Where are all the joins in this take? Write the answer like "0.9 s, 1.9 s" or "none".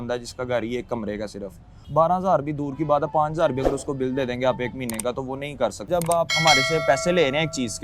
1.7 s, 5.9 s